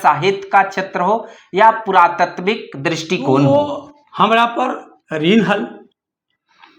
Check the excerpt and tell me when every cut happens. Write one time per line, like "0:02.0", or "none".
0:03.5